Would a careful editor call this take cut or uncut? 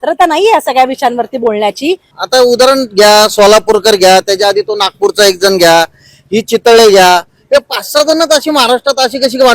cut